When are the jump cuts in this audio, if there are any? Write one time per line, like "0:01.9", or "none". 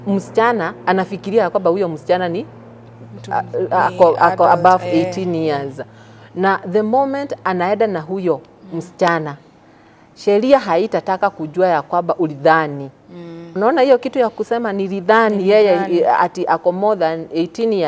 none